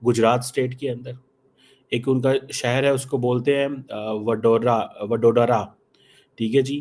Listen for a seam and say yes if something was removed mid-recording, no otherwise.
no